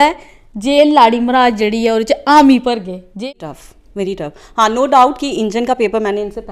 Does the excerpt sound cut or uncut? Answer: cut